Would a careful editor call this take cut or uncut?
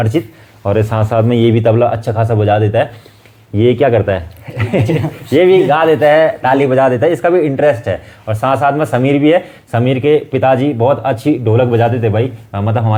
uncut